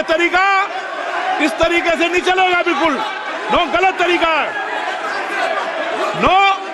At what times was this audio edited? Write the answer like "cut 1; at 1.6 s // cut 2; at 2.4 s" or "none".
none